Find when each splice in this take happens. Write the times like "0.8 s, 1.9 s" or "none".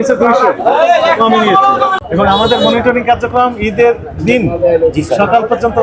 1.9 s